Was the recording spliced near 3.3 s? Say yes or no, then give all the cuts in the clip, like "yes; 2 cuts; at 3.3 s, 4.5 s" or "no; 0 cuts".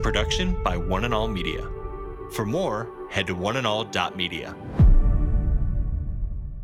no; 0 cuts